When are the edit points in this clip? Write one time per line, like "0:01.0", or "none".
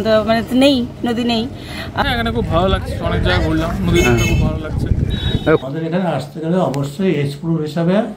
0:02.0
0:05.7